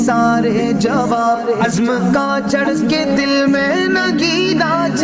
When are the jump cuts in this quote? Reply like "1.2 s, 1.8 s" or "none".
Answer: none